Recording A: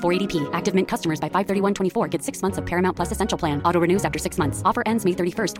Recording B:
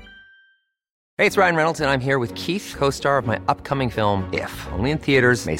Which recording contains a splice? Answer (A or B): B